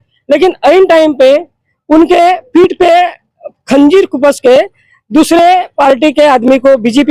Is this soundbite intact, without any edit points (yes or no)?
yes